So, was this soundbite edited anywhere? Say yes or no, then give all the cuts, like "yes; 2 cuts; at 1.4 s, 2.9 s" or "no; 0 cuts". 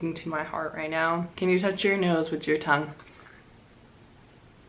yes; 1 cut; at 1.3 s